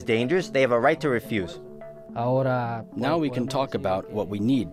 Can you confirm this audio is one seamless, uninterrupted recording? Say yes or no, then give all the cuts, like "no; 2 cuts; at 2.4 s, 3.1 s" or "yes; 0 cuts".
yes; 0 cuts